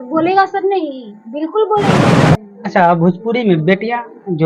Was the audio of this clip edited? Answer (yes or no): yes